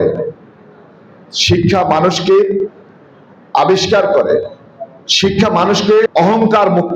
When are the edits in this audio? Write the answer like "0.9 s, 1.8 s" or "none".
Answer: 6.0 s